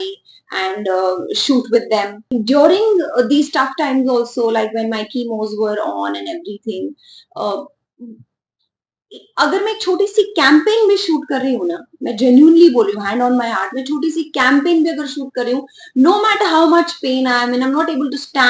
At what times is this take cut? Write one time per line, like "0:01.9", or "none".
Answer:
0:02.2